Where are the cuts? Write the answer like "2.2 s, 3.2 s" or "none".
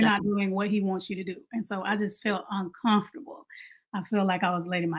none